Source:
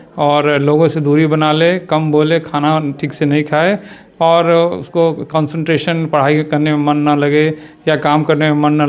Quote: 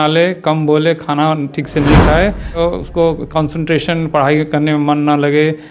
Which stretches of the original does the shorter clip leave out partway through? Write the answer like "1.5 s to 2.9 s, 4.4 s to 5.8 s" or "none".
4.0 s to 4.6 s